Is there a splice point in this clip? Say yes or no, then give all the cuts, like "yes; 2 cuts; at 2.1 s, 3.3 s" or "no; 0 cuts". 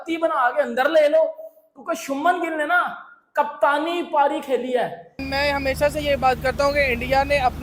yes; 1 cut; at 5.3 s